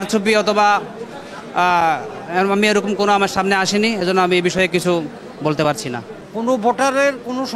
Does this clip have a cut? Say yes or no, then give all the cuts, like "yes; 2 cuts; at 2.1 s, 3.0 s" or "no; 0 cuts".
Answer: no; 0 cuts